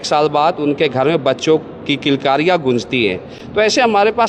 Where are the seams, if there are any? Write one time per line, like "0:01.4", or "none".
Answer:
none

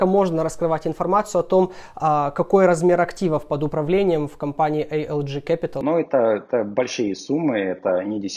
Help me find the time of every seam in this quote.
0:05.8

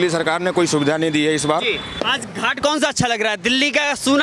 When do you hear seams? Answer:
0:01.9

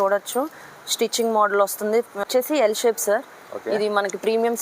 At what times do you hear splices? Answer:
0:02.1

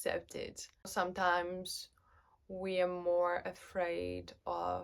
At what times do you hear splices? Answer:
0:00.9

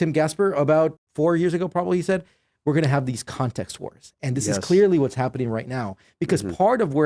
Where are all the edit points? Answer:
0:00.9

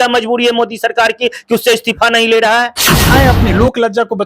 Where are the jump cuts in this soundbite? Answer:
0:03.1

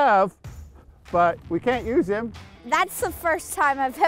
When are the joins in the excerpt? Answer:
0:02.6

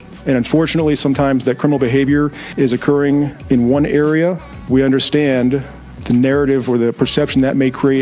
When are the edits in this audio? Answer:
0:02.4
0:03.4
0:04.5
0:05.9

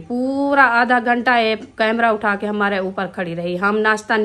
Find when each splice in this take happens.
none

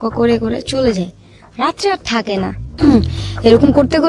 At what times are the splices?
0:02.6

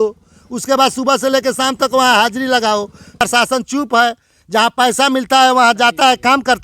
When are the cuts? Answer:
0:03.2

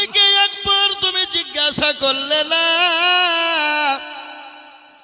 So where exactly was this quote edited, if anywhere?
none

